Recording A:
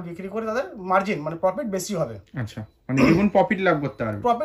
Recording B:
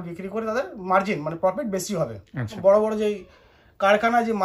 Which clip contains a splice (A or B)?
B